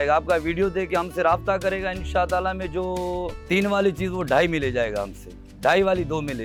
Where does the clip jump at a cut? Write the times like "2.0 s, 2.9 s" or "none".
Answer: none